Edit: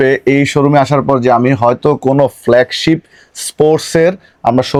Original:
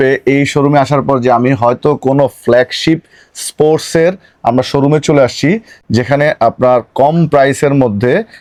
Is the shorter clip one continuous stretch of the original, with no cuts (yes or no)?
yes